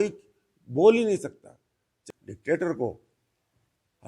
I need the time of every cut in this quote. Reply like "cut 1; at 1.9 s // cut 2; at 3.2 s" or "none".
cut 1; at 2.0 s